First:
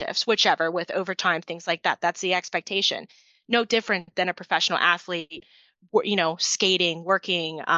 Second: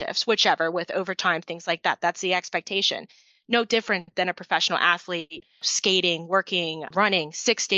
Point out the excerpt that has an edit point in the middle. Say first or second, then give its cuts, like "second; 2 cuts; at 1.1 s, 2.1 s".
second; 2 cuts; at 5.7 s, 6.9 s